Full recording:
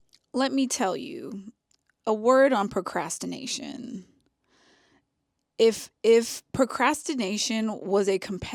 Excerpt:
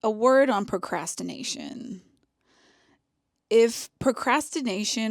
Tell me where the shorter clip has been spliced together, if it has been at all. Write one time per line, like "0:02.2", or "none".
0:03.3